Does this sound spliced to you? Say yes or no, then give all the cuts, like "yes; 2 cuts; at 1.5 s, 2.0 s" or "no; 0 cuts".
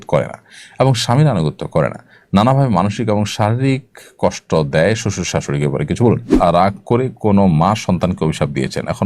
yes; 1 cut; at 6.3 s